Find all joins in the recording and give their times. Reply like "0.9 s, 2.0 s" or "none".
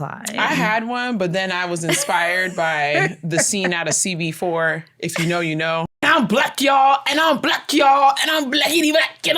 6.0 s